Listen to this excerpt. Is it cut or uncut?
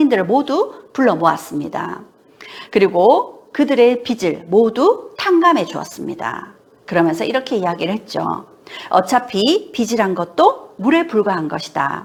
uncut